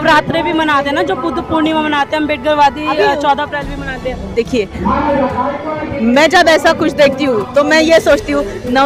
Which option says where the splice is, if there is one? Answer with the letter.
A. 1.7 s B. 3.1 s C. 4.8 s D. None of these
D